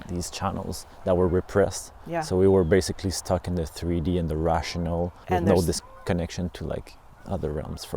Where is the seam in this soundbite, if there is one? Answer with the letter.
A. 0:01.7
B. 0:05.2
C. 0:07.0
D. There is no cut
B